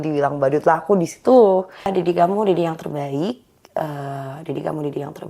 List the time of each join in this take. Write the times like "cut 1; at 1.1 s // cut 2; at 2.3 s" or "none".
cut 1; at 1.9 s